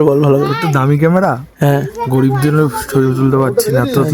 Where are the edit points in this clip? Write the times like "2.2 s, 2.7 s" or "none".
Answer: none